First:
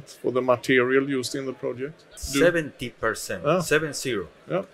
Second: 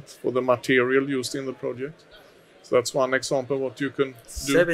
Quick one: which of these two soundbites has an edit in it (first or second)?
first